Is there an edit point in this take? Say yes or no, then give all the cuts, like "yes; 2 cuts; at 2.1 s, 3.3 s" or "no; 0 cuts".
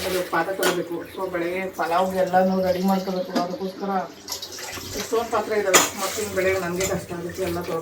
no; 0 cuts